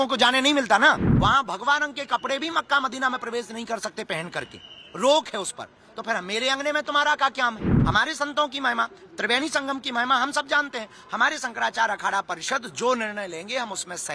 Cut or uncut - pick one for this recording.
cut